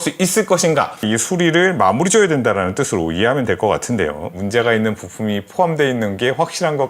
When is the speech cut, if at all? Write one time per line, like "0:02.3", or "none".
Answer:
0:01.1
0:04.4